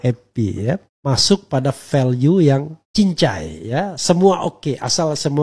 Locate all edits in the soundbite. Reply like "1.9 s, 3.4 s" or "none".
0.9 s, 2.8 s